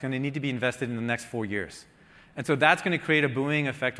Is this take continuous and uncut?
yes; 0 cuts

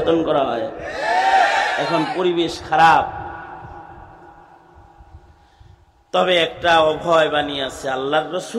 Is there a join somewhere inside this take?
no; 0 cuts

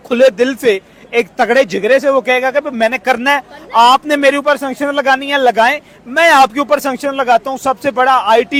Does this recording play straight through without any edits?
yes; 0 cuts

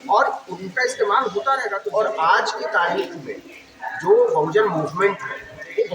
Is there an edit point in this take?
yes; 1 cut; at 1.8 s

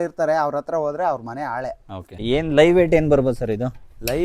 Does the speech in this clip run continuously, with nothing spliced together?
no; 1 cut; at 2.2 s

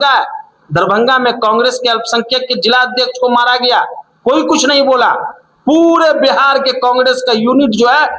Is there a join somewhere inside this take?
no; 0 cuts

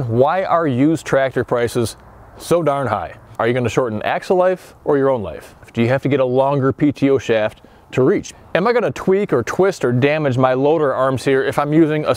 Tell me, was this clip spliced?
yes; 3 cuts; at 3.3 s, 5.7 s, 8.4 s

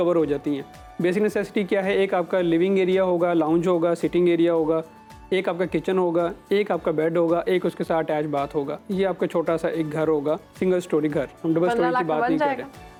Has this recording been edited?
no; 0 cuts

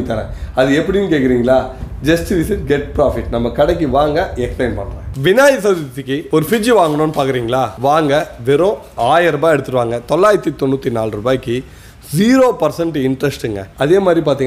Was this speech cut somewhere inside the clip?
no; 0 cuts

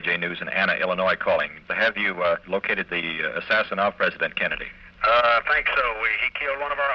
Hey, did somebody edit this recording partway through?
yes; 2 cuts; at 1.7 s, 2.4 s

